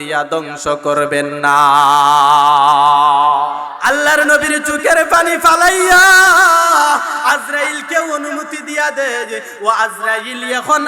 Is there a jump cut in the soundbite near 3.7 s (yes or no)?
yes